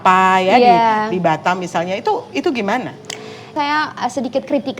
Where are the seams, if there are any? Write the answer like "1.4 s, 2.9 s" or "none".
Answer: 3.5 s